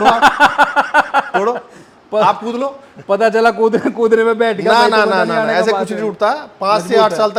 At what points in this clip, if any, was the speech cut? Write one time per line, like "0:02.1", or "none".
none